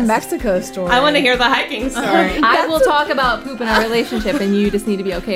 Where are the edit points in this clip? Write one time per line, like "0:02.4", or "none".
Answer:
0:02.3